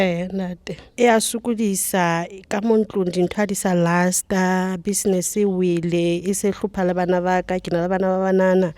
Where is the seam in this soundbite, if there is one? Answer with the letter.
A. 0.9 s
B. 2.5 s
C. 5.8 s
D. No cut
A